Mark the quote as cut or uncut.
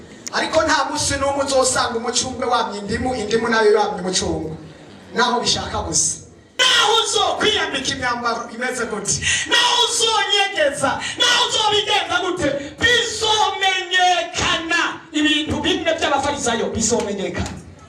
cut